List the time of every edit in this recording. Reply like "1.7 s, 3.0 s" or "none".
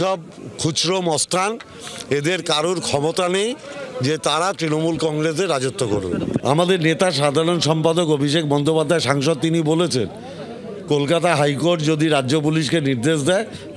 6.4 s